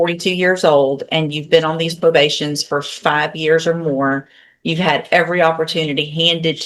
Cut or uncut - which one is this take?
uncut